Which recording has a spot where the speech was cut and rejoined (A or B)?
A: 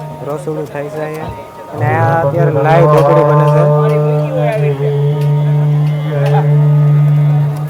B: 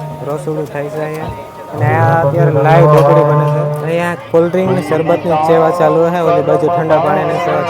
B